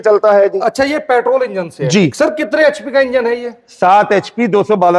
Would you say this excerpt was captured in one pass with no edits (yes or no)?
yes